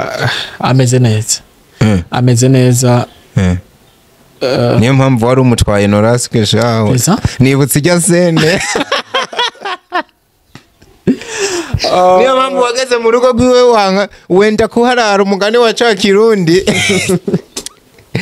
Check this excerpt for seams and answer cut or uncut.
uncut